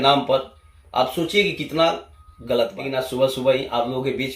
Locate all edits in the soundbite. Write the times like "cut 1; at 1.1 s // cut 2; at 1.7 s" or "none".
cut 1; at 2.8 s